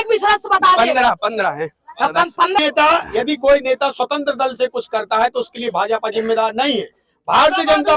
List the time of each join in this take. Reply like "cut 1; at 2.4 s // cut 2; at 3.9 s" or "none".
cut 1; at 2.6 s